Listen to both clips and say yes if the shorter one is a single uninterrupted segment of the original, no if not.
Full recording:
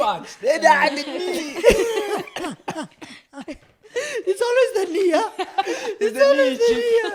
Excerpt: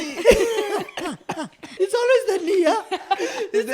no